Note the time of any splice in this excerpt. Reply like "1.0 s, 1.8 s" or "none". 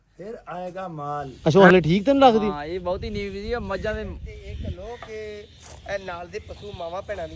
1.3 s

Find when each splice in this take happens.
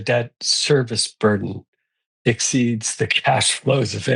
none

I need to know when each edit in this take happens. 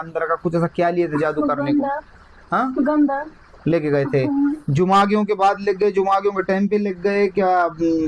none

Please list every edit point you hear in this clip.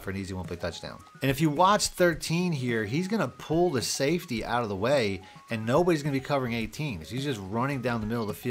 1.0 s

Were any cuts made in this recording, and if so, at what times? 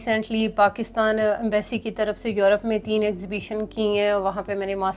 none

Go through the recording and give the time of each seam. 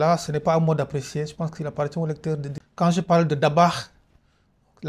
2.6 s

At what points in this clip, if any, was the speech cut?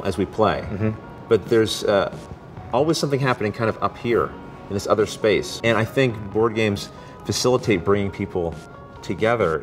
1.1 s, 5.5 s

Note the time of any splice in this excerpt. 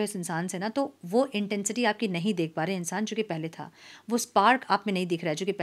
none

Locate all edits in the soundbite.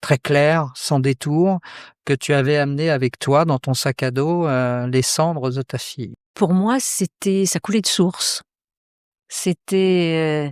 6.2 s

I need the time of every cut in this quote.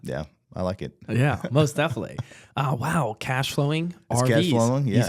none

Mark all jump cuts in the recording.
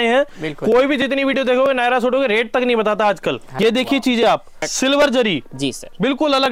3.5 s, 4.6 s

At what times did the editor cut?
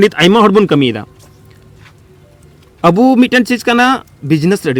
none

